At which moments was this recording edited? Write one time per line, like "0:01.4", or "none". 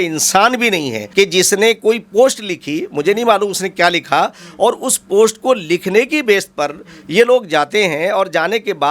0:01.0